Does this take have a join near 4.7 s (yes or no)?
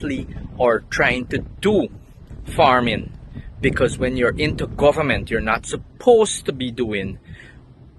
no